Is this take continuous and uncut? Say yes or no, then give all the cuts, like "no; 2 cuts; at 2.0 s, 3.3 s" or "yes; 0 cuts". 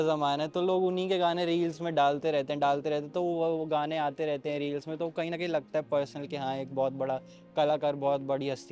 yes; 0 cuts